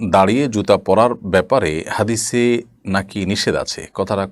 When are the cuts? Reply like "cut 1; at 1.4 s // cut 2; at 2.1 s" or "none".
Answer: none